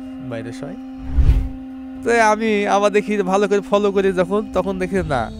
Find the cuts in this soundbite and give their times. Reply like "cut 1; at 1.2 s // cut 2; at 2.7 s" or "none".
cut 1; at 1.2 s